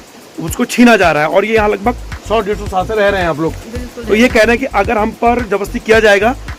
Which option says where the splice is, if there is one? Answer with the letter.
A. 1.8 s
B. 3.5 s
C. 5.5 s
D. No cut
D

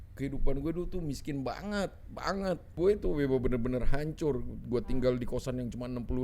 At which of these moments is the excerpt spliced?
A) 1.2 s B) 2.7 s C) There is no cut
B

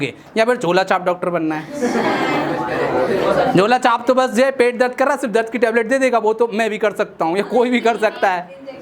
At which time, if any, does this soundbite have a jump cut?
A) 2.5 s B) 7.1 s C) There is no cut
C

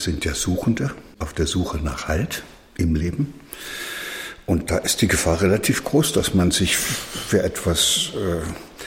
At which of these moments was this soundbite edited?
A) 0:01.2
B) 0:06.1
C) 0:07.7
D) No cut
A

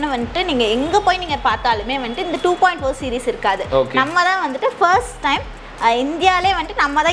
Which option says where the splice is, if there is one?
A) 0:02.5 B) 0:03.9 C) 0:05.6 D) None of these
D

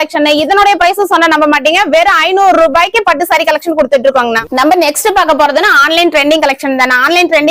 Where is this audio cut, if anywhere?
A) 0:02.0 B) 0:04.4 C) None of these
C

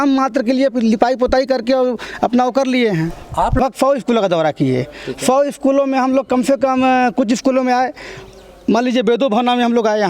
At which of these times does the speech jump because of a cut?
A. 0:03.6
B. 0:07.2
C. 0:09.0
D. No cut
A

